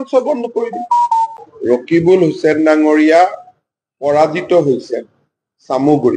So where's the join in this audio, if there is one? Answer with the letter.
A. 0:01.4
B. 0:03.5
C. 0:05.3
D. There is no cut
A